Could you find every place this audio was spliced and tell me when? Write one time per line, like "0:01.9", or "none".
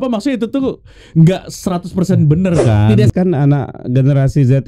0:03.1

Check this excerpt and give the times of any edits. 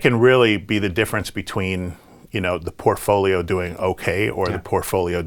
none

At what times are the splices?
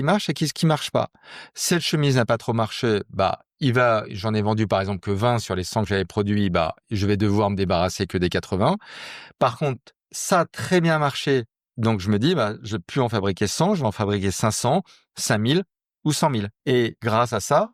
0:16.5

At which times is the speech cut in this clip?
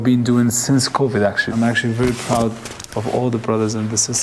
0:01.5

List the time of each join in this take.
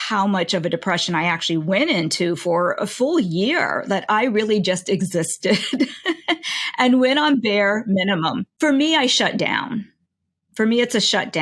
0:08.4

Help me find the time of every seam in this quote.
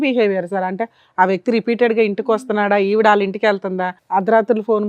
0:03.9

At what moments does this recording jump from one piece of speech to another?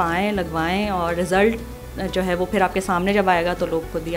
none

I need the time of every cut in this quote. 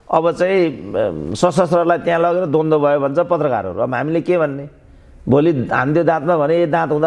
none

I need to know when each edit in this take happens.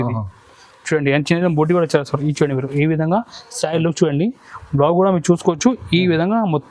none

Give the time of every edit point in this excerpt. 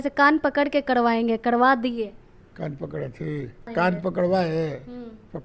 0:03.7

